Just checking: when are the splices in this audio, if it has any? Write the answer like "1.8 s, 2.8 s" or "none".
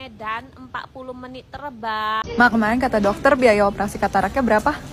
2.2 s